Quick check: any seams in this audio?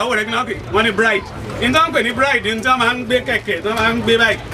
no; 0 cuts

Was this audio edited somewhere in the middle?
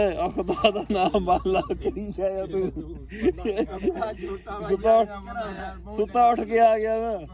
no; 0 cuts

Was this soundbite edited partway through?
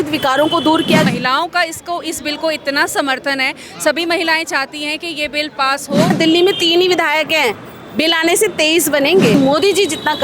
yes; 3 cuts; at 1.1 s, 6.1 s, 9.3 s

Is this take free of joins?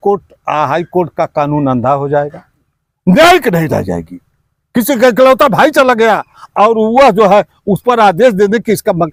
yes; 0 cuts

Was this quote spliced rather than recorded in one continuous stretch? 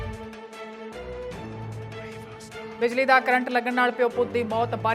yes; 1 cut; at 1.0 s

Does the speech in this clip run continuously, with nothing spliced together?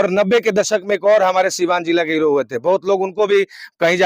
yes; 0 cuts

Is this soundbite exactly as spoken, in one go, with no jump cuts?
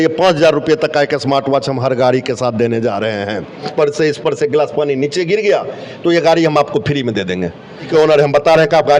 no; 2 cuts; at 3.6 s, 7.9 s

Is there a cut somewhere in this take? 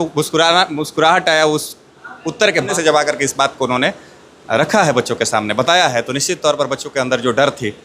yes; 1 cut; at 2.7 s

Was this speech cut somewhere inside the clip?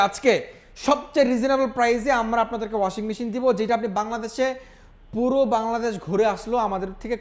no; 0 cuts

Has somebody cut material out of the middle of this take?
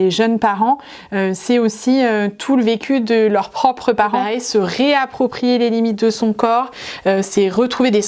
yes; 1 cut; at 4.3 s

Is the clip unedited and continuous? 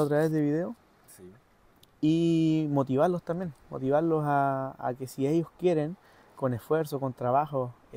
yes; 0 cuts

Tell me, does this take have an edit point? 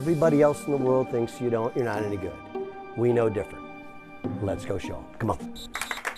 no; 0 cuts

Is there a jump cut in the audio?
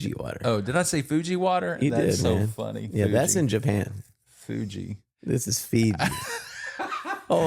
no; 0 cuts

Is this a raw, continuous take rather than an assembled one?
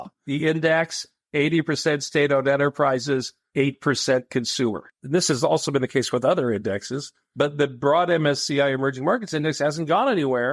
no; 1 cut; at 5.0 s

